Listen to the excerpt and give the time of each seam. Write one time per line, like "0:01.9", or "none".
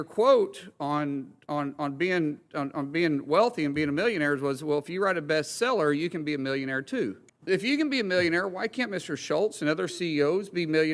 0:07.3